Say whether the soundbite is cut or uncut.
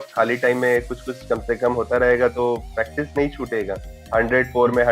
cut